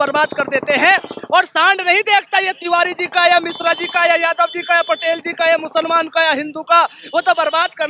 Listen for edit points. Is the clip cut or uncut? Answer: uncut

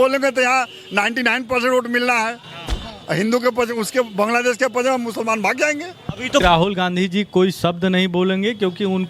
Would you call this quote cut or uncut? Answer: cut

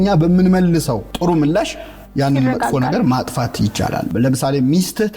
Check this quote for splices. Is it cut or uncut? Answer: cut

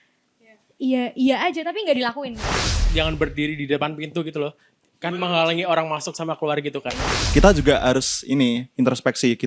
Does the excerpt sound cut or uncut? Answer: cut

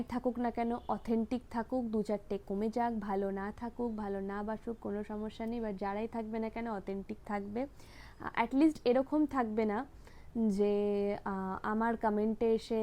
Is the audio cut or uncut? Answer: uncut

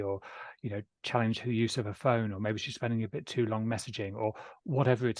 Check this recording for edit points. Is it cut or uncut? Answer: uncut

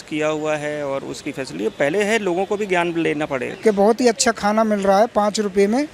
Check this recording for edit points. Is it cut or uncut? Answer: cut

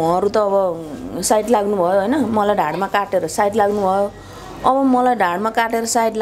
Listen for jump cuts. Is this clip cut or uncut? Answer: uncut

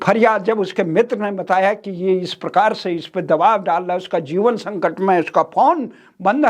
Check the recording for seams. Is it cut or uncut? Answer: uncut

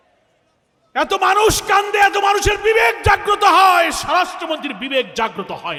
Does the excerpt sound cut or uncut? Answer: uncut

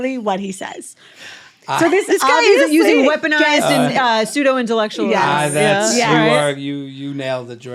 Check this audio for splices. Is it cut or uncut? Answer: uncut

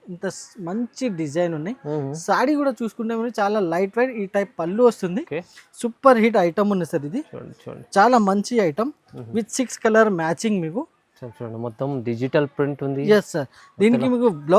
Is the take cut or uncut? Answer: uncut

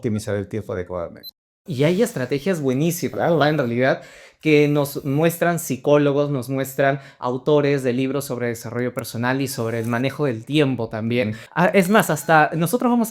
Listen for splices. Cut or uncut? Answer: cut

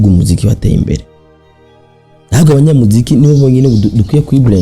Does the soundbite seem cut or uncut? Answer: uncut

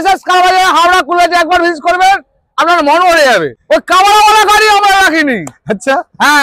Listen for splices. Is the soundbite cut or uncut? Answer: cut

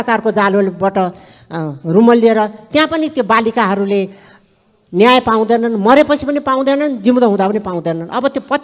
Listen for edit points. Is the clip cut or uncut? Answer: uncut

